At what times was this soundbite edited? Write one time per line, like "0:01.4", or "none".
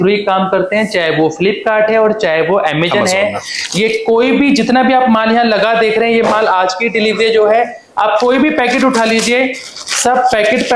none